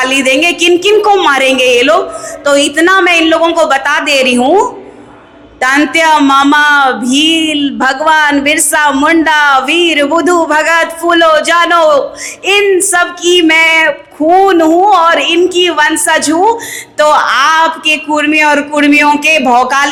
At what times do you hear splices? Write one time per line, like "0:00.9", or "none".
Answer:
none